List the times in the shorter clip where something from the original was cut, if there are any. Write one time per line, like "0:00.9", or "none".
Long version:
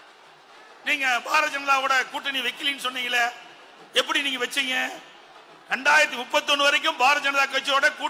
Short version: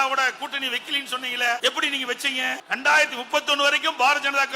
0:01.6
0:02.6

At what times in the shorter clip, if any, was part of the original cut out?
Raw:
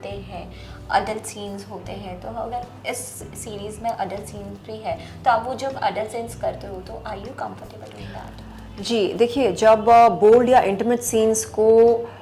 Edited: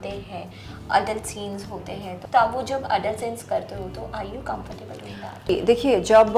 0:02.2
0:05.5

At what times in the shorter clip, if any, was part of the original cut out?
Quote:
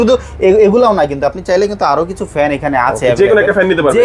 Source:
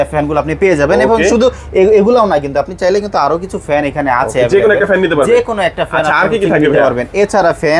none

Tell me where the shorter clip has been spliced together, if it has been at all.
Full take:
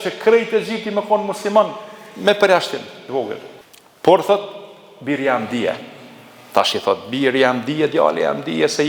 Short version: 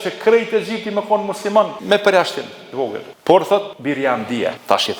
0:01.8
0:03.1
0:04.1

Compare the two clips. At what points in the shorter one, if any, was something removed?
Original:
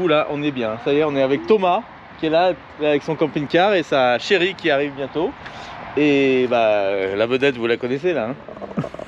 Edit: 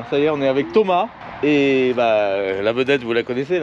0:01.2

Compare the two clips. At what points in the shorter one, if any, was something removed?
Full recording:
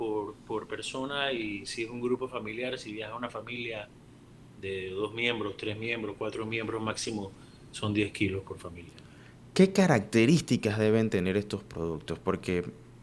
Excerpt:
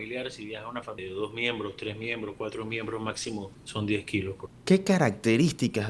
0:01.0
0:03.6
0:04.5

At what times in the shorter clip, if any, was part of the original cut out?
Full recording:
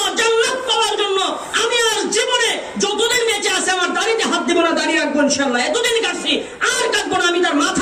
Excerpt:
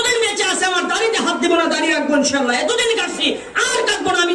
none

